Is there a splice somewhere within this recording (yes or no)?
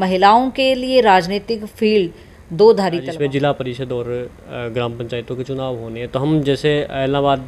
yes